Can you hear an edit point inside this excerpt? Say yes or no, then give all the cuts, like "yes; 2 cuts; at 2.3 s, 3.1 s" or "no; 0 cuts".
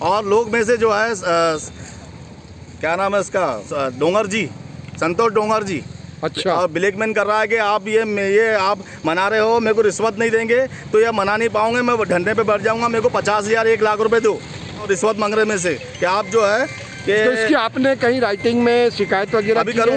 yes; 2 cuts; at 3.6 s, 14.8 s